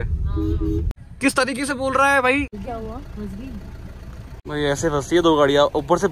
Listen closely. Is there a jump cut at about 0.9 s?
yes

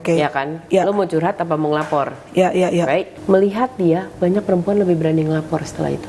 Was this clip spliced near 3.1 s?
yes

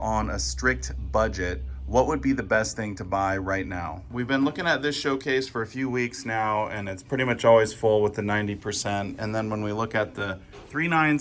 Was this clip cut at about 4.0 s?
yes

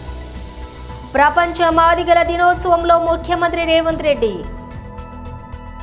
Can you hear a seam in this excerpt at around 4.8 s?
yes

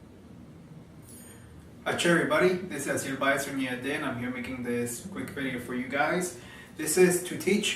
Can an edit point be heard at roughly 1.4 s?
no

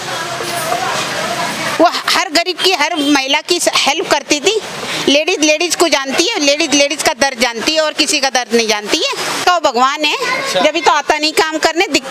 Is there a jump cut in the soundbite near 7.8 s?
no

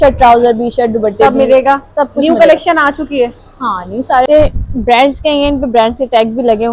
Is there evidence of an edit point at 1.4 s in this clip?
no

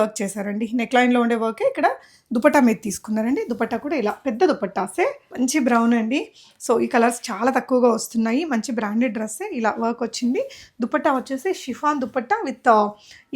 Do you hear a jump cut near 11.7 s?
no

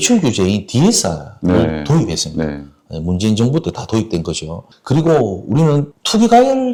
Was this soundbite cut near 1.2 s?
no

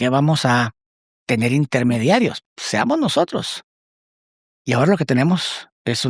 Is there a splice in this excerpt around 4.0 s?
no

